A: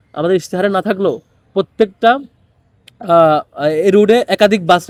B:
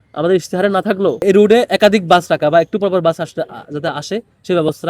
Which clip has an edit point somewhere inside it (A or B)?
B